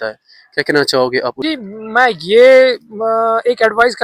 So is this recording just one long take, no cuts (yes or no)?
no